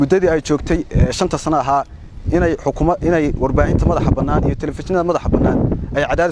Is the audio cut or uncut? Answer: uncut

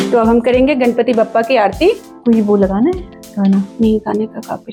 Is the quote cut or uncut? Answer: uncut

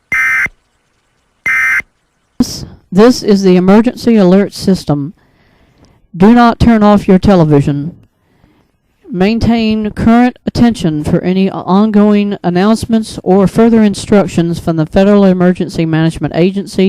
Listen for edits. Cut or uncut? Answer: cut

